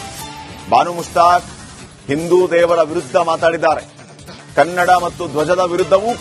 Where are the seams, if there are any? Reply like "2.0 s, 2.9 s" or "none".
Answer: none